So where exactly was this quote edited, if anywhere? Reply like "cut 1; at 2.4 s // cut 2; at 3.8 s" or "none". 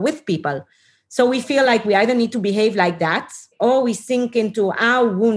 none